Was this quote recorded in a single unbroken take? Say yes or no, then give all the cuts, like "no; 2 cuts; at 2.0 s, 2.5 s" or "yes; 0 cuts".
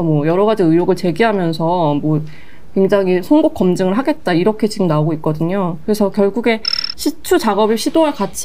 yes; 0 cuts